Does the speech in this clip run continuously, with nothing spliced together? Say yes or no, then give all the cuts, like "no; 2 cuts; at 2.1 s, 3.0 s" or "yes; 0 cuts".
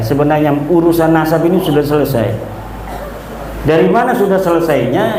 yes; 0 cuts